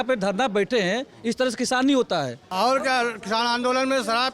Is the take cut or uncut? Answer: cut